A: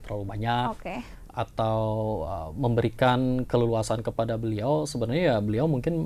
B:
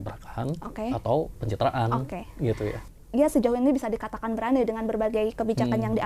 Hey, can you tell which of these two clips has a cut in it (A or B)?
B